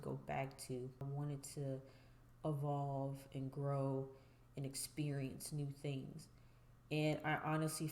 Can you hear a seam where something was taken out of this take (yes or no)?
yes